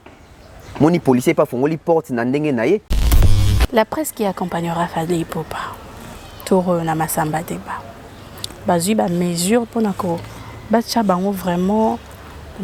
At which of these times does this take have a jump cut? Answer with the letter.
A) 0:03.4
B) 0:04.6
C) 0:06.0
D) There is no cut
A